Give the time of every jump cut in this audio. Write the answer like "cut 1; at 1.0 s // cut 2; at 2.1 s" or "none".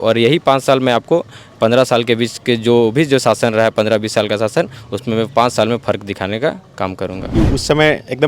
cut 1; at 7.3 s